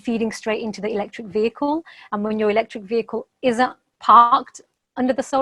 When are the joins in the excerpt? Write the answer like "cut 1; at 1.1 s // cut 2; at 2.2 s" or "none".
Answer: none

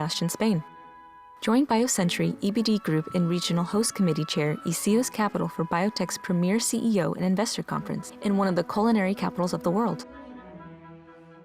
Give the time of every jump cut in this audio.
cut 1; at 10.0 s

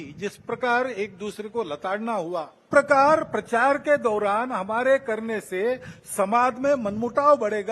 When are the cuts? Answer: cut 1; at 2.6 s

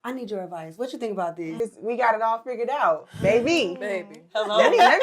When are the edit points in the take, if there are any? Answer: cut 1; at 1.6 s

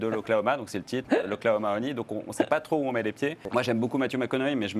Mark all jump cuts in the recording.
cut 1; at 3.4 s

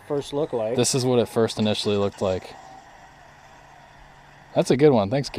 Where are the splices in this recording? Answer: cut 1; at 4.5 s

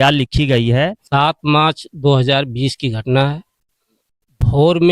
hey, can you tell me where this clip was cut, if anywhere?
cut 1; at 1.0 s

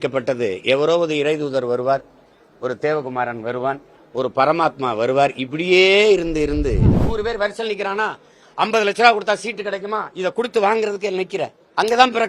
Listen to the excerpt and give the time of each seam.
cut 1; at 7.0 s

